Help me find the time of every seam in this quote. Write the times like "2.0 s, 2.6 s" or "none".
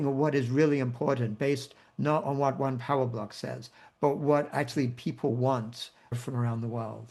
6.1 s